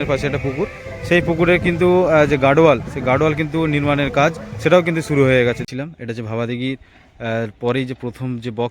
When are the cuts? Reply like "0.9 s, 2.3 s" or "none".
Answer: 5.7 s